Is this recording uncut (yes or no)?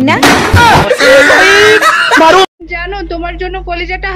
no